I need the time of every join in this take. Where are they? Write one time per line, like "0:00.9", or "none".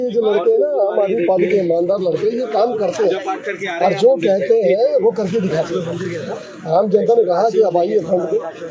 none